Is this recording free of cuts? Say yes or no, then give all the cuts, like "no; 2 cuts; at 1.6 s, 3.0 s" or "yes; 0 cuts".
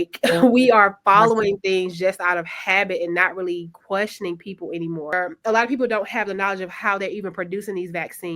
no; 1 cut; at 5.2 s